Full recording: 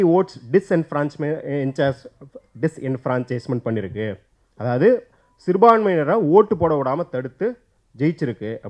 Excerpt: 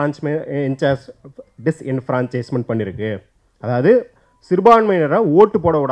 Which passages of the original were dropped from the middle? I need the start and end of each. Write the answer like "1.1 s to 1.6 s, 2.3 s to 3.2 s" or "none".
none